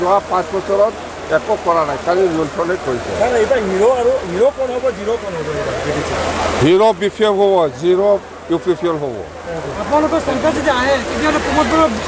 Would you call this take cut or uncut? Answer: uncut